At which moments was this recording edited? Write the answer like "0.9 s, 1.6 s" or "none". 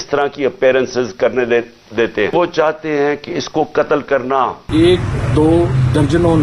2.3 s, 4.7 s